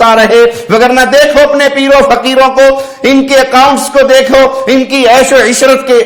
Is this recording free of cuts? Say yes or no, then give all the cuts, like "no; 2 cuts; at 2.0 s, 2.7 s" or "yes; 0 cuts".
yes; 0 cuts